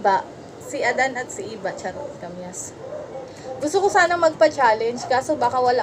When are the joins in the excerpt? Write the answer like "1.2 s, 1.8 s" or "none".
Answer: 2.2 s